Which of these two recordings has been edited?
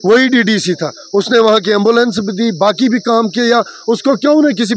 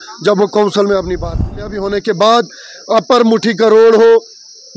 second; 1 cut; at 1.8 s

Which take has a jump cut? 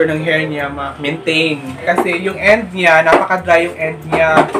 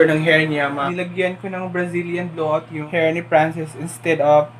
second; 2 cuts; at 0.8 s, 2.8 s

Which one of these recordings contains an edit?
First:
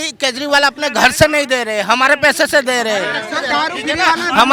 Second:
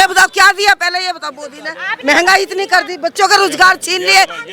second; 1 cut; at 1.9 s

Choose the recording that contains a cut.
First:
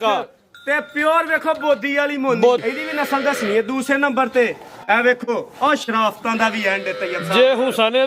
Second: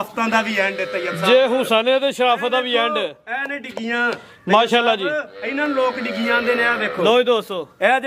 first; 1 cut; at 2.7 s

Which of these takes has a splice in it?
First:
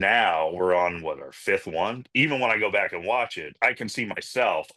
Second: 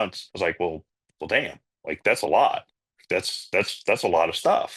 first; 2 cuts; at 2.0 s, 3.4 s

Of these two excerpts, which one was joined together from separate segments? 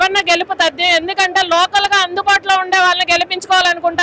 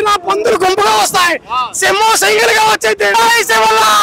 second; 1 cut; at 3.1 s

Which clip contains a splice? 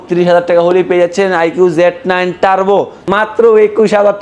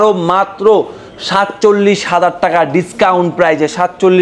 first; 1 cut; at 3.0 s

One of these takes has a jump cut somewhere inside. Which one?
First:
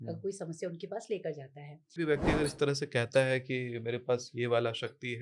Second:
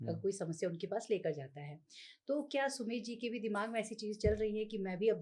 first; 1 cut; at 2.0 s

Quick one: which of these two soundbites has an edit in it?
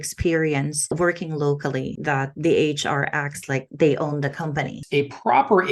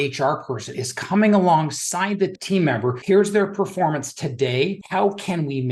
first; 3 cuts; at 0.9 s, 1.9 s, 4.7 s

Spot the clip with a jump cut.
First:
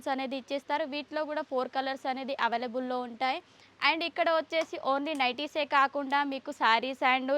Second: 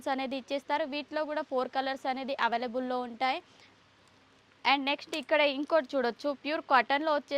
second; 1 cut; at 3.7 s

